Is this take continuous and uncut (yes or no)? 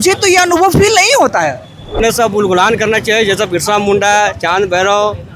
no